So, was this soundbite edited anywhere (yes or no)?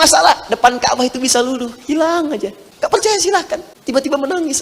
yes